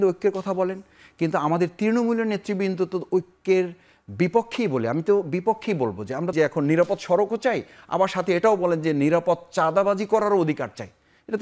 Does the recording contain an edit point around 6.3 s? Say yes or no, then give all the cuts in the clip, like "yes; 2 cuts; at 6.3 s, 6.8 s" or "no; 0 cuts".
yes; 1 cut; at 6.3 s